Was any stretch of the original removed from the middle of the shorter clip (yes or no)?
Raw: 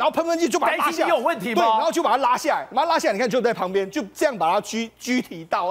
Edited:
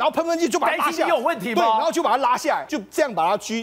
yes